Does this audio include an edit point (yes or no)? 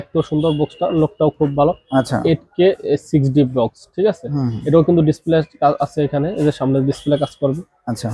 no